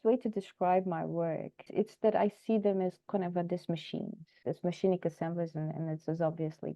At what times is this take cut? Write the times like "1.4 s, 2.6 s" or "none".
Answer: 1.7 s, 4.3 s

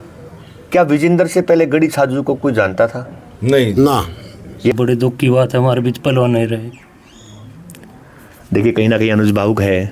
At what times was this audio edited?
4.7 s

